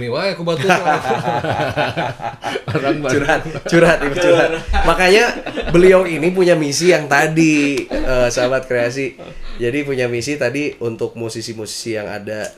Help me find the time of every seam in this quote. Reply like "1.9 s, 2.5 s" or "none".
none